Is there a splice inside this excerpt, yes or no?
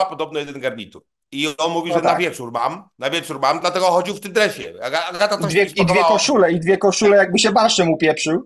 no